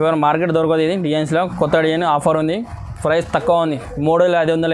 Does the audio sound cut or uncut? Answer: uncut